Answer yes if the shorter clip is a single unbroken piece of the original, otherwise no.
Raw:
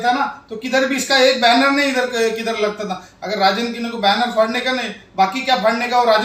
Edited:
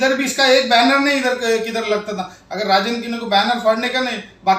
yes